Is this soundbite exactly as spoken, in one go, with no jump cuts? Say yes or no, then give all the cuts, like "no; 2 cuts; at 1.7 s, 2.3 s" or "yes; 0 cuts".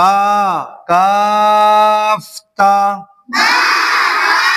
yes; 0 cuts